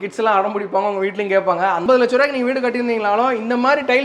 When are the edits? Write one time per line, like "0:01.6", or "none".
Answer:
0:01.8